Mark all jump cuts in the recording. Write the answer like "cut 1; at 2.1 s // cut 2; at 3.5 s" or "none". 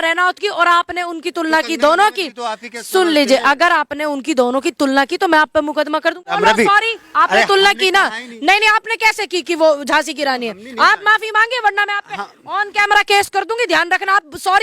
cut 1; at 6.3 s